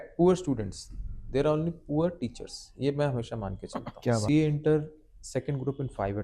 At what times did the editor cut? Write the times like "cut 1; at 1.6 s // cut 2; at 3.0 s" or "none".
cut 1; at 4.2 s